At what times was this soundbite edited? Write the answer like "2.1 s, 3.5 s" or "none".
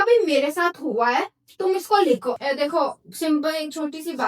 2.4 s